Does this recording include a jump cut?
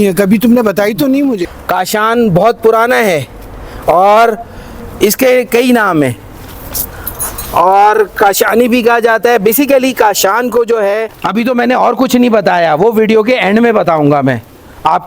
yes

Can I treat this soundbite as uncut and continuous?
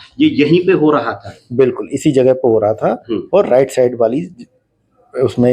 yes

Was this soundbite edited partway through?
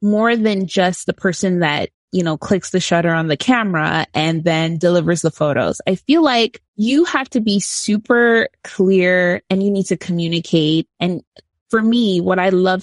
yes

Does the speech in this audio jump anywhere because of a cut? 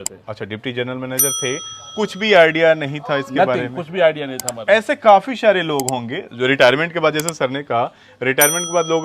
no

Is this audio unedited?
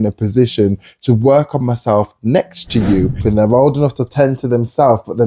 no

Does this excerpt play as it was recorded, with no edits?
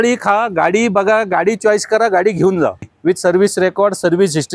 no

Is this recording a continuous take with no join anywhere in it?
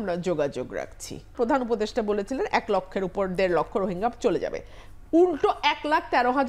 no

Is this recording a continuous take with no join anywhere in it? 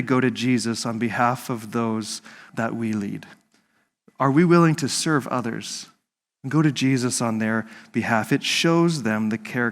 no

